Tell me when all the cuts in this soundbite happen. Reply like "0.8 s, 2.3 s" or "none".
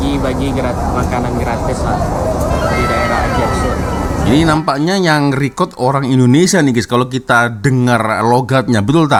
none